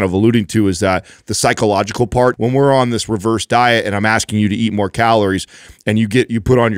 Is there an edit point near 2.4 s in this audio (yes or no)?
yes